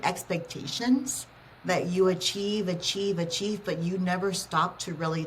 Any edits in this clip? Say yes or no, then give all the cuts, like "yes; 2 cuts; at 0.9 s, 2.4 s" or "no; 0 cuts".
no; 0 cuts